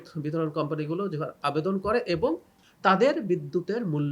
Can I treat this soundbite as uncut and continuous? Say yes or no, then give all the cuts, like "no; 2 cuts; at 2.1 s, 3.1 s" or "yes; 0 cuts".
no; 1 cut; at 2.5 s